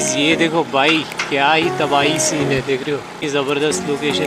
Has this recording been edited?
yes; 1 cut; at 3.2 s

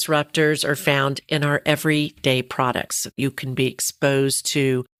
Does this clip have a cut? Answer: no; 0 cuts

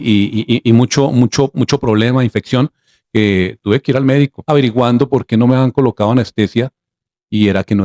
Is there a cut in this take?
yes; 1 cut; at 4.4 s

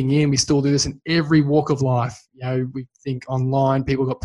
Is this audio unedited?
yes; 0 cuts

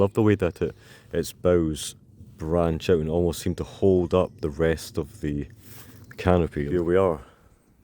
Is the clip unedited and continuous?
no; 1 cut; at 6.7 s

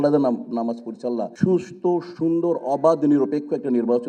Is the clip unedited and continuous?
yes; 0 cuts

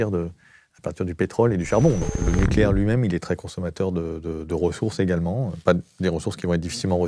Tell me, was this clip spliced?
yes; 1 cut; at 2.1 s

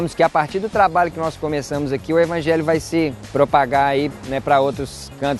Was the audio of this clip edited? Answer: yes; 2 cuts; at 3.2 s, 4.2 s

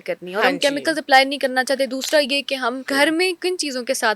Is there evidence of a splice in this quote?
yes; 1 cut; at 3.1 s

